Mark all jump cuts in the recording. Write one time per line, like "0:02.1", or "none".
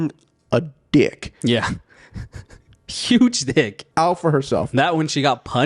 0:03.8